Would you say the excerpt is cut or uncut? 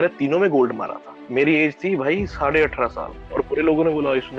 cut